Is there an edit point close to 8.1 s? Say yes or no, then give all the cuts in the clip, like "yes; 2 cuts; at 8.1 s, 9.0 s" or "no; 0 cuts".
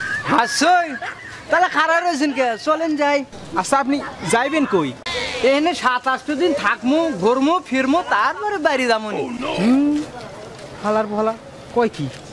yes; 2 cuts; at 5.1 s, 8.1 s